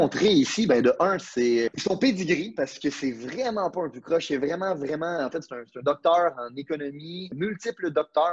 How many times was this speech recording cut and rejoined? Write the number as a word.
two